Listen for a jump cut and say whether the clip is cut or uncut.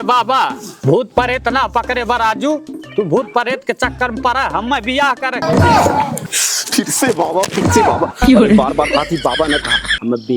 cut